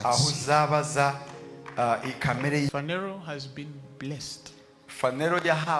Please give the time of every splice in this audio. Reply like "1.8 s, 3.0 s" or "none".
2.7 s